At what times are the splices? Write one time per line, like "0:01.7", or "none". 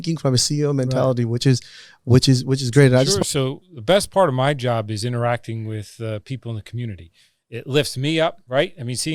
0:03.1

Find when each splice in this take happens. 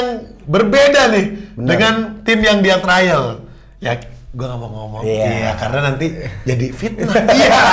none

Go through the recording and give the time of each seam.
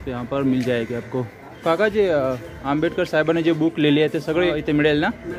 0:01.4
0:04.5

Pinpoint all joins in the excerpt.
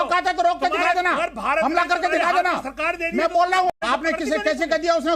0:03.7

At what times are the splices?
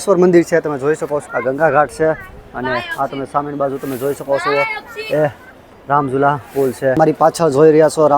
0:01.2
0:07.0

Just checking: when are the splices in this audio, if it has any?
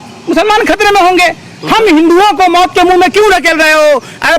none

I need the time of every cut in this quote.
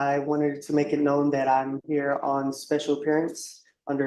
none

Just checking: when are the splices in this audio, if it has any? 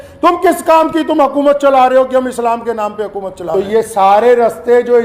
0:03.4

